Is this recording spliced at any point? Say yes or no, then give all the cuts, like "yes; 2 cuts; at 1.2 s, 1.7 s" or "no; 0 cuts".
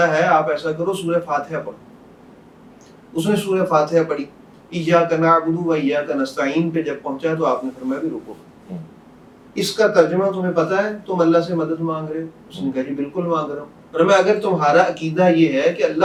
no; 0 cuts